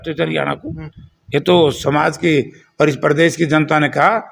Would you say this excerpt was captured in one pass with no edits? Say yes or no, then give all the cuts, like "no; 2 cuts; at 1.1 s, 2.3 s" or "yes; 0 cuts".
yes; 0 cuts